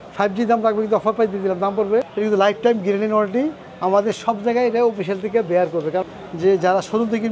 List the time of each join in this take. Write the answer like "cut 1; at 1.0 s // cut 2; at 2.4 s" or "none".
cut 1; at 2.1 s // cut 2; at 6.1 s